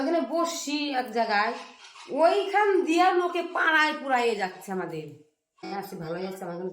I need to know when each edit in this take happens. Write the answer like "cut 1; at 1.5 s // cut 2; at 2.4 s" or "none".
cut 1; at 5.6 s